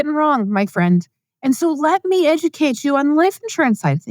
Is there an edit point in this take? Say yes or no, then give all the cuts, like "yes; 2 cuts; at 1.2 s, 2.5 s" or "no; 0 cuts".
no; 0 cuts